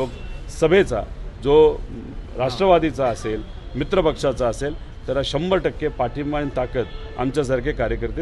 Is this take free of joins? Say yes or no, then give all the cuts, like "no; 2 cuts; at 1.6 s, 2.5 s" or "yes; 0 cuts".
yes; 0 cuts